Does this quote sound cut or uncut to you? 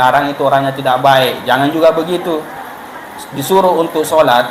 uncut